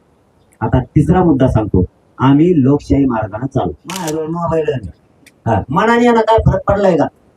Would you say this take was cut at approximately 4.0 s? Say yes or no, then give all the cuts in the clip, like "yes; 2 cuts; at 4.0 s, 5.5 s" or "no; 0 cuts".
yes; 1 cut; at 4.0 s